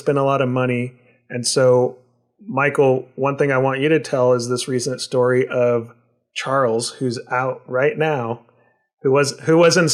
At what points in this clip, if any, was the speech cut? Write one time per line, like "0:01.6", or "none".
none